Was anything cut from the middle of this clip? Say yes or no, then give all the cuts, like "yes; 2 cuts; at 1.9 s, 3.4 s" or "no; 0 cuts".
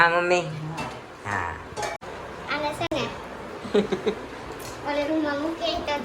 yes; 1 cut; at 2.0 s